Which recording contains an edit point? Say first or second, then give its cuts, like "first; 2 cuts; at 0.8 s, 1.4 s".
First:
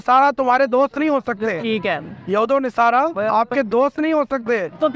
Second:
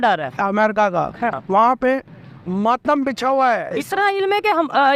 second; 1 cut; at 3.4 s